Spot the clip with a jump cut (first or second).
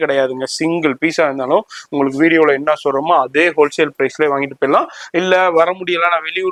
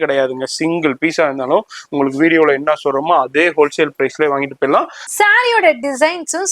second